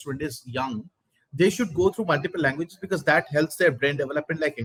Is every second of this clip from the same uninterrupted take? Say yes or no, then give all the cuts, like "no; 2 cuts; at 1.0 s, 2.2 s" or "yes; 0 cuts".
yes; 0 cuts